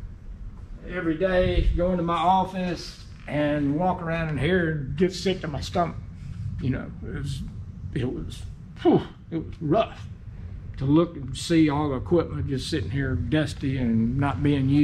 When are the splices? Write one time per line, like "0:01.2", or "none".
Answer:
none